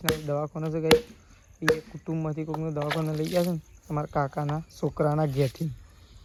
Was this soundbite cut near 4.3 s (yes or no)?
no